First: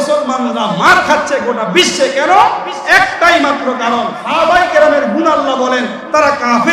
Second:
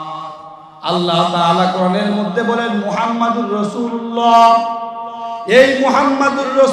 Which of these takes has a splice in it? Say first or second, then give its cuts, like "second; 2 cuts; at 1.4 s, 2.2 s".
first; 1 cut; at 4.2 s